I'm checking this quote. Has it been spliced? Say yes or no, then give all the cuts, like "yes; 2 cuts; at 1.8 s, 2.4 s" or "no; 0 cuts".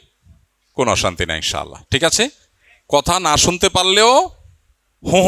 no; 0 cuts